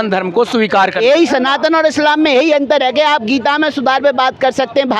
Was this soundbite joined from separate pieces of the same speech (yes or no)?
no